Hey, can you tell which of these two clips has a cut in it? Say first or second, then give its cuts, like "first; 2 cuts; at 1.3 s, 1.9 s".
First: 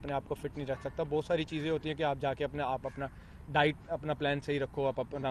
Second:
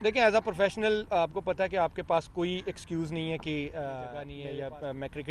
second; 1 cut; at 4.3 s